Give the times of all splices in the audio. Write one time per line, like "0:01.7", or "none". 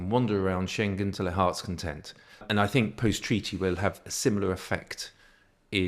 0:02.4